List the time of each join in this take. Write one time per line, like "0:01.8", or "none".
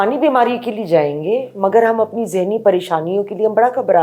none